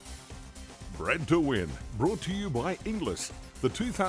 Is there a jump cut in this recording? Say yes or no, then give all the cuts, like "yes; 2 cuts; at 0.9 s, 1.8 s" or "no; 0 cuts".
yes; 1 cut; at 1.0 s